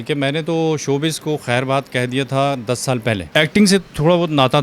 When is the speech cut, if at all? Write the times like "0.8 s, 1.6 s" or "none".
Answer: 3.2 s